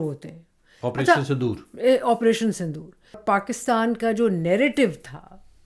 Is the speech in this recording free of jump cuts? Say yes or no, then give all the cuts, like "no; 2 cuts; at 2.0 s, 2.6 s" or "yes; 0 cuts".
no; 1 cut; at 3.2 s